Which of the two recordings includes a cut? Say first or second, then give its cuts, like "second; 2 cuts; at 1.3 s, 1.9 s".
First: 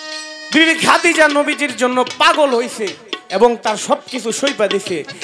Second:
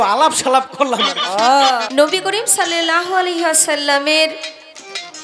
second; 1 cut; at 1.9 s